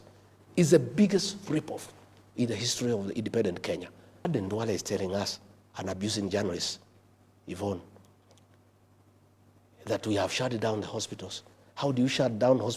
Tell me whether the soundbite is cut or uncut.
cut